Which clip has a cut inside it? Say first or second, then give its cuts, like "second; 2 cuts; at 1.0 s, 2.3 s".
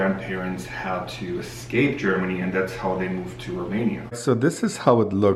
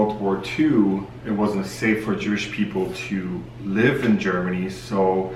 first; 1 cut; at 4.1 s